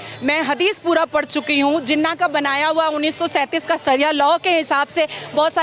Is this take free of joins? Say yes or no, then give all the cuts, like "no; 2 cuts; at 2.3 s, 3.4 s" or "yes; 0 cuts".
yes; 0 cuts